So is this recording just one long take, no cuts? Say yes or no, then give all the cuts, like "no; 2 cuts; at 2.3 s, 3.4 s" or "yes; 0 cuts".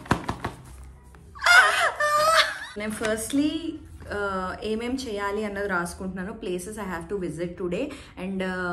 no; 1 cut; at 2.6 s